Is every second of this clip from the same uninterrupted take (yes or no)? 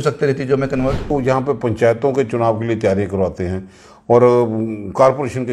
no